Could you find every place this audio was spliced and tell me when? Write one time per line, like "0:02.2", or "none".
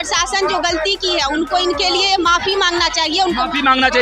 none